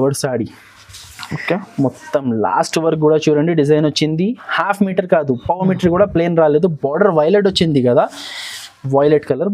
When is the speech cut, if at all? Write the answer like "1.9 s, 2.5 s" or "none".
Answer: none